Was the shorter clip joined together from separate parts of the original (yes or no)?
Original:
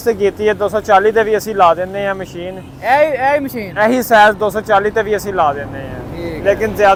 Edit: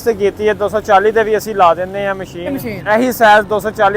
yes